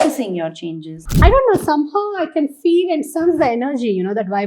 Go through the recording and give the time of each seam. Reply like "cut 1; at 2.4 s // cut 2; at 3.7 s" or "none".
cut 1; at 1.0 s